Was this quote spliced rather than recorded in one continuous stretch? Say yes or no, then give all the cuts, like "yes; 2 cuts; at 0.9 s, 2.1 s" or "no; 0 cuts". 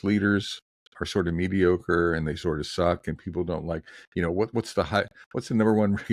no; 0 cuts